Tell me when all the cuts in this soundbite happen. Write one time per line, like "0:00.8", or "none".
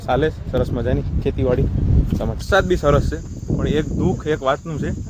0:02.4

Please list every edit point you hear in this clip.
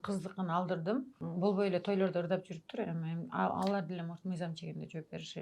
0:01.2

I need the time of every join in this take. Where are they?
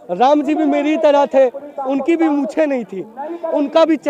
none

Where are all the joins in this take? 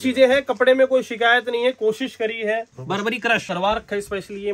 0:03.4

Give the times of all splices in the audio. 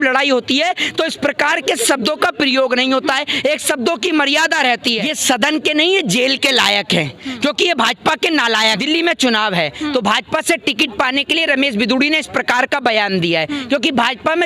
0:05.1
0:08.8

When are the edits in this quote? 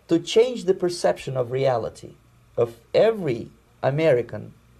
none

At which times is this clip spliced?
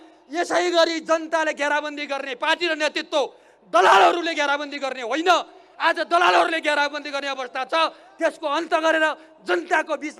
none

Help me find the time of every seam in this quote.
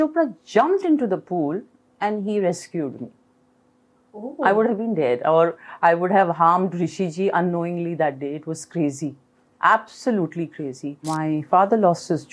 0:11.0

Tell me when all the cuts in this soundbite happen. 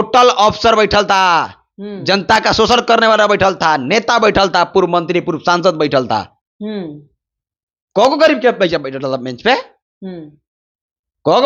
none

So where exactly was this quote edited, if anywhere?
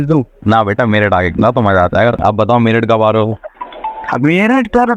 0:02.2

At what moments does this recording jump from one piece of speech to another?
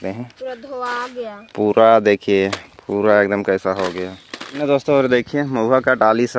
0:04.5

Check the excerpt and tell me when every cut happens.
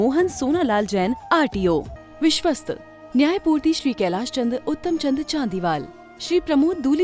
0:02.0

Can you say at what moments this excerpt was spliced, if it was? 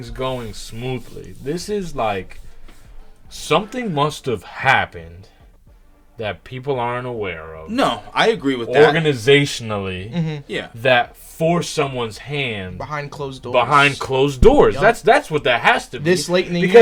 none

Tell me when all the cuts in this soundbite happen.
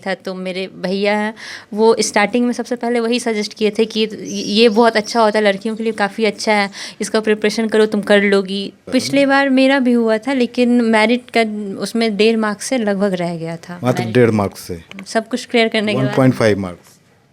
0:08.8

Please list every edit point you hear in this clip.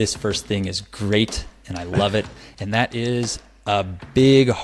0:02.4

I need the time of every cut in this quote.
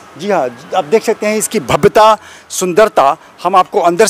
none

